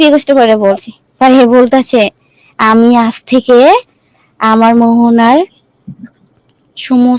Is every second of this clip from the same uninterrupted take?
yes; 0 cuts

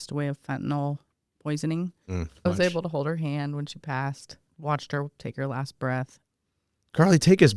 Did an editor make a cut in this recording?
yes; 3 cuts; at 2.4 s, 4.5 s, 6.2 s

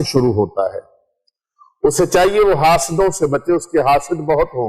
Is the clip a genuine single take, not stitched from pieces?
yes; 0 cuts

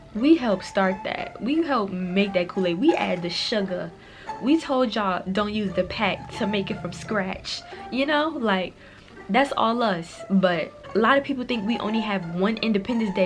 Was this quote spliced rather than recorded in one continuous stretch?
yes; 1 cut; at 10.8 s

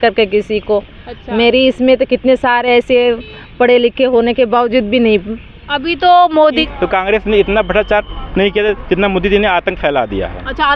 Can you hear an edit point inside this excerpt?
yes; 1 cut; at 6.7 s

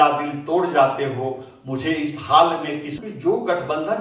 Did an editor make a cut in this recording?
yes; 1 cut; at 3.0 s

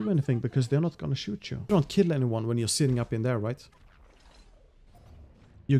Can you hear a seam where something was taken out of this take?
yes; 1 cut; at 1.7 s

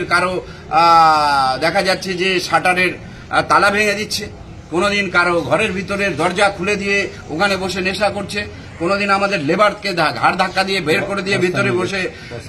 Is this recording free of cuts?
yes; 0 cuts

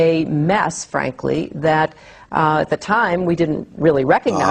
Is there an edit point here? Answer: no; 0 cuts

